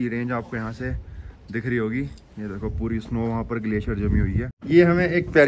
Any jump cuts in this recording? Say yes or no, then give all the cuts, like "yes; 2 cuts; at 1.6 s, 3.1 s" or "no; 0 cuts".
yes; 1 cut; at 4.5 s